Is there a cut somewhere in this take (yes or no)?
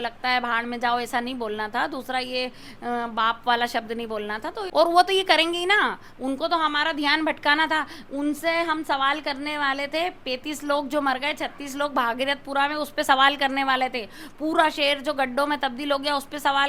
yes